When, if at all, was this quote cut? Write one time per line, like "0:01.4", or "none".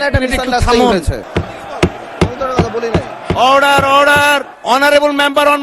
0:01.2
0:04.5